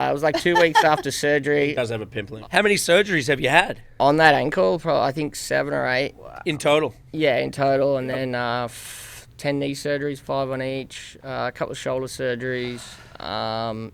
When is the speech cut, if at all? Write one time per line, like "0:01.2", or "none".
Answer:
0:02.4